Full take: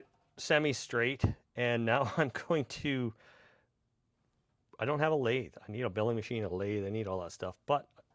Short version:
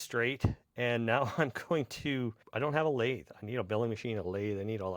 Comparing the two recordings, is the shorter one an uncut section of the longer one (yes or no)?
no